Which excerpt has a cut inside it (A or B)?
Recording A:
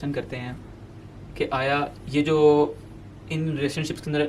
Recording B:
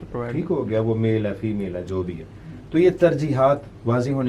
A